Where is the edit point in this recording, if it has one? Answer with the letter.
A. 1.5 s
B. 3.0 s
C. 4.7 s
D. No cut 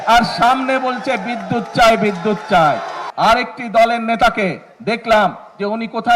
B